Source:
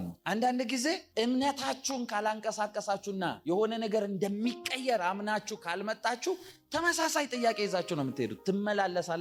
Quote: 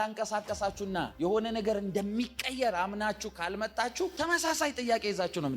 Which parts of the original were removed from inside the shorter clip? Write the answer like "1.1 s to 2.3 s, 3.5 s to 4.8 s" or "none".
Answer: 6.4 s to 6.7 s